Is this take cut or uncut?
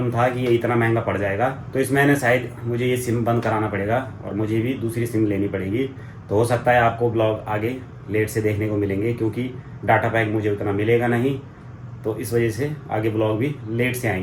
uncut